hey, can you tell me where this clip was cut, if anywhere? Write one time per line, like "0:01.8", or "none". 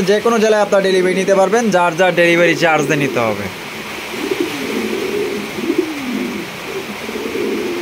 none